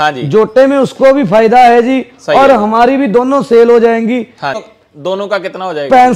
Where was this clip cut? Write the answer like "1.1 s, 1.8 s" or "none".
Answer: 4.7 s